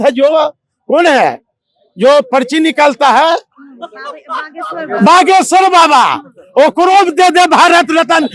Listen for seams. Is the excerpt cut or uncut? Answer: uncut